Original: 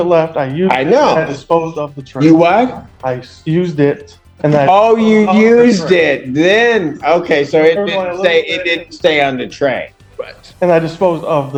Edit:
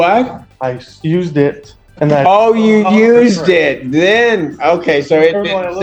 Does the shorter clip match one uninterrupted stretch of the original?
yes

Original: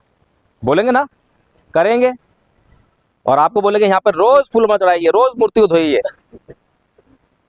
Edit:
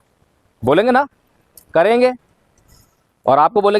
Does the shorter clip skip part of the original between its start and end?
no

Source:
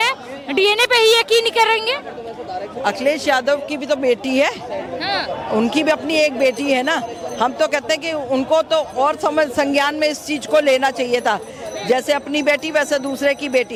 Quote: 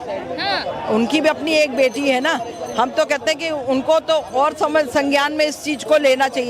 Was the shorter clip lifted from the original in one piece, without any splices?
yes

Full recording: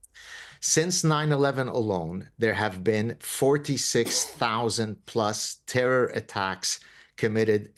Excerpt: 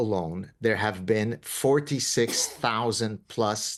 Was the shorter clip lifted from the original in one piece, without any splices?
yes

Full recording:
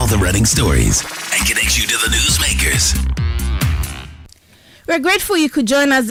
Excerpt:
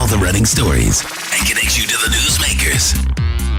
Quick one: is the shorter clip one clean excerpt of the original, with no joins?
yes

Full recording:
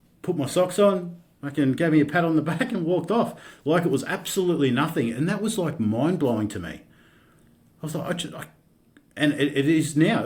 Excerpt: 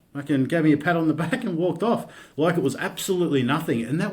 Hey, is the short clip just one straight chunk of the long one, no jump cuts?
yes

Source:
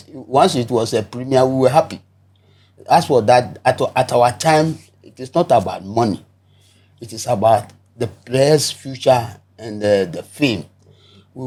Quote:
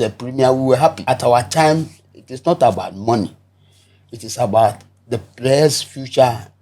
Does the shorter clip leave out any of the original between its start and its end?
yes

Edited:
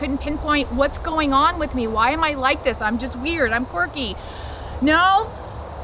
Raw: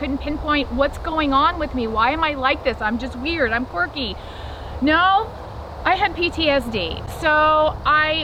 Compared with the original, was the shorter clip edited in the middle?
no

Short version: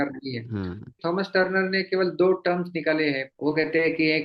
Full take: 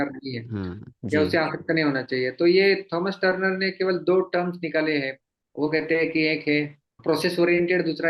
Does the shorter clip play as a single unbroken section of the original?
no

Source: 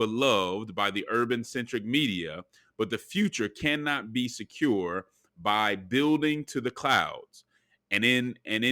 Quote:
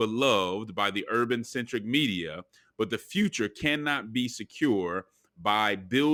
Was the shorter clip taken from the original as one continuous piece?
yes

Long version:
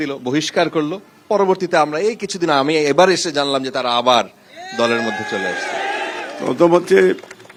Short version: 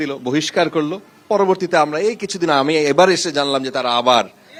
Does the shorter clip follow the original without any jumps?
yes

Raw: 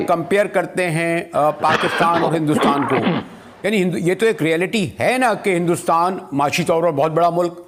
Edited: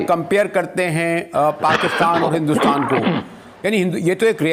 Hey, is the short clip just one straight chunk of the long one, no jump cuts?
yes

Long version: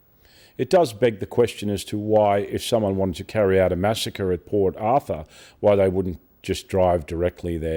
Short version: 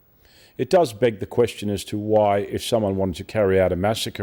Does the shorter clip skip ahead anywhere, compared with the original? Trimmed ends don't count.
no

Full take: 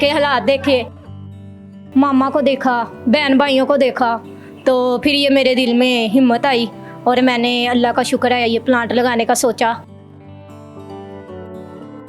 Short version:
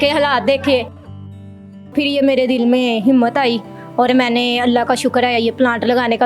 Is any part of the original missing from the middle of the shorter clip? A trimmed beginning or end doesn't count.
yes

